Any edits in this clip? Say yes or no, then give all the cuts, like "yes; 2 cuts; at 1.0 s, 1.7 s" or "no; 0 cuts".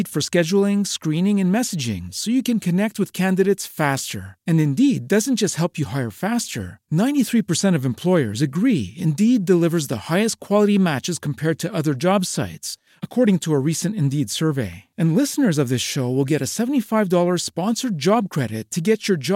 no; 0 cuts